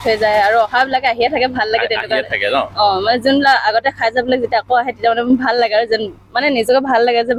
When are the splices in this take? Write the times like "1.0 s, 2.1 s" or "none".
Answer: none

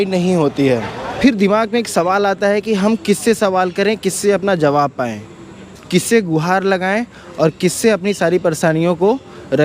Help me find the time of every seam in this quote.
1.0 s

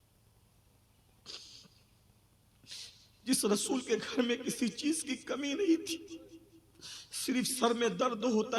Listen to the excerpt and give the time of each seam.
none

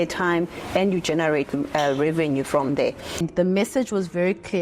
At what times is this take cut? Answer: 3.3 s

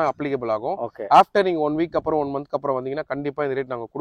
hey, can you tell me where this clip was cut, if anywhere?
none

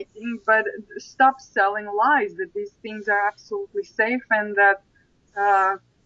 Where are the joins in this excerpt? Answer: none

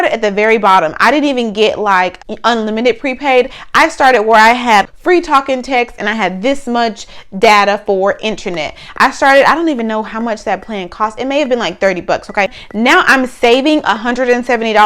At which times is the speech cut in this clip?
2.2 s, 4.9 s, 12.6 s

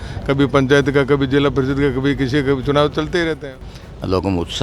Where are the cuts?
3.5 s

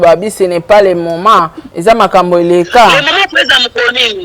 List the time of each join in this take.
1.6 s

